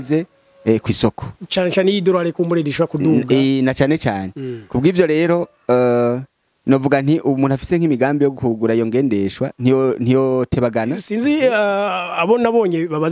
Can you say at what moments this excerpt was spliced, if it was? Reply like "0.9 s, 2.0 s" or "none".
11.0 s